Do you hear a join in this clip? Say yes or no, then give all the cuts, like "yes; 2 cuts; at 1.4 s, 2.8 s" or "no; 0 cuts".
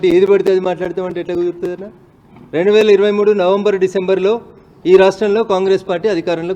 no; 0 cuts